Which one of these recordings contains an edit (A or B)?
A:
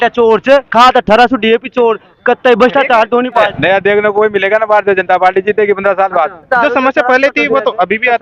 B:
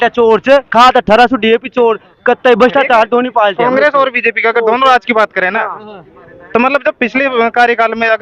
A